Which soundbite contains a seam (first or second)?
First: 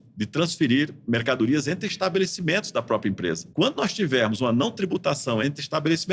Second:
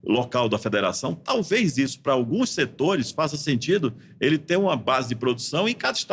first